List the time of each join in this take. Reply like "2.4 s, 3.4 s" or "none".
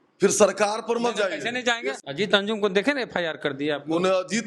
2.0 s